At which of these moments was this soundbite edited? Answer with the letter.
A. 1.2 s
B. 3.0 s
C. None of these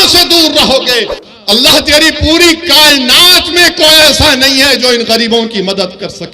A